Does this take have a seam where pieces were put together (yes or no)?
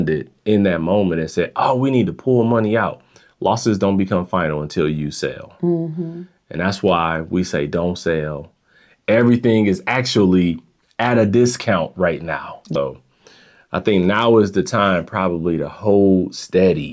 yes